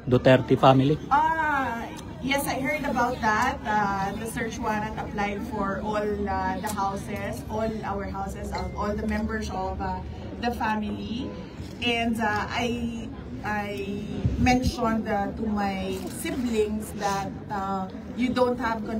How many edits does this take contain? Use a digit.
0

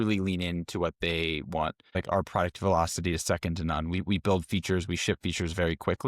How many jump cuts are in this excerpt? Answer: 1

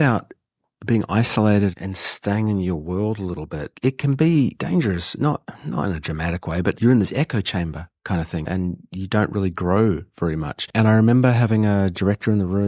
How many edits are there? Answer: 2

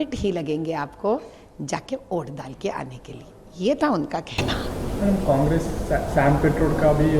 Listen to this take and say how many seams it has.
0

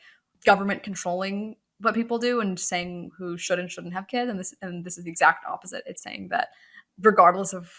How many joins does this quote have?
0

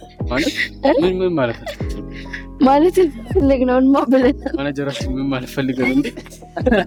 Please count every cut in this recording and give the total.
0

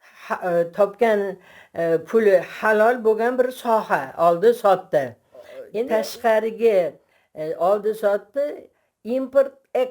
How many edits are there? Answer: 1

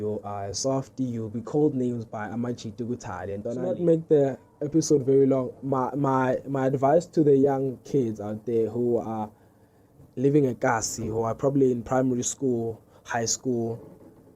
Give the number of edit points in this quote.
1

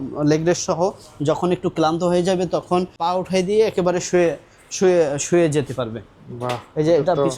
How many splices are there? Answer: 1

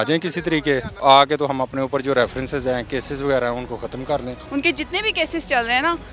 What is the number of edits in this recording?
2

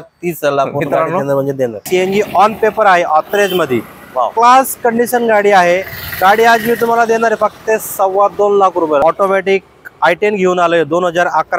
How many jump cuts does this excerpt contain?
2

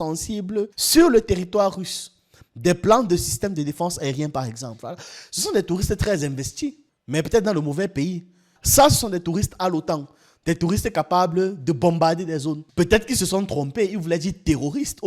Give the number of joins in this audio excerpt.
1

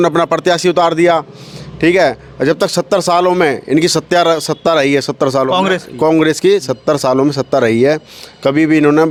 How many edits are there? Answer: 0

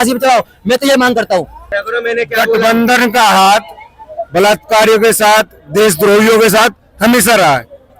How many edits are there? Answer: 1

